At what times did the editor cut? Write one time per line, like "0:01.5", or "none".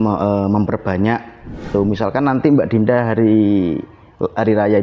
0:01.7